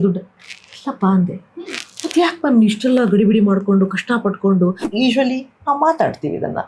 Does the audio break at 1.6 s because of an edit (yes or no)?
no